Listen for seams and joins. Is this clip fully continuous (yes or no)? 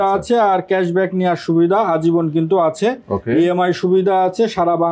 yes